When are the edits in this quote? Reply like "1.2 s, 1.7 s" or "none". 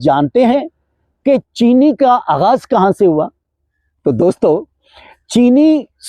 none